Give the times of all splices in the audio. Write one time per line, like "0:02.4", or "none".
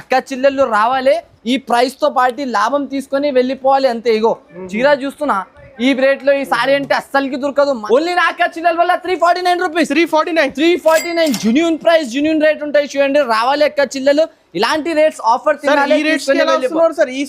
0:07.8